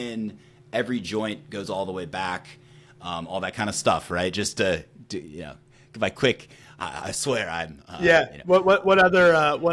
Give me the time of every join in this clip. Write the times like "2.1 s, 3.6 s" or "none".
none